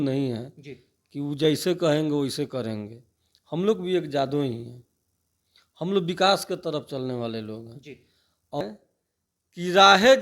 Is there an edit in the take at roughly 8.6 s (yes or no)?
yes